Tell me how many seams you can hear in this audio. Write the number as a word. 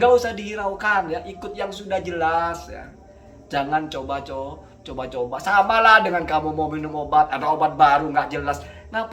zero